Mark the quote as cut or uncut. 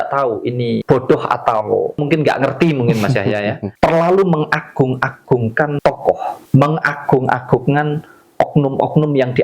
cut